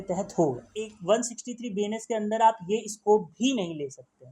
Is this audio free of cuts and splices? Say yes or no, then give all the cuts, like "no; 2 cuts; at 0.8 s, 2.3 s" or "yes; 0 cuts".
no; 1 cut; at 0.9 s